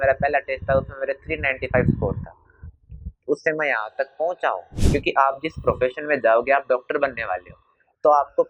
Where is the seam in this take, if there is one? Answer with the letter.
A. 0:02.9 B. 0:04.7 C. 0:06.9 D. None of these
B